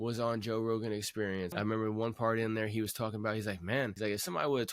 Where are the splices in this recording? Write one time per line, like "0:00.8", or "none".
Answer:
0:01.5
0:03.9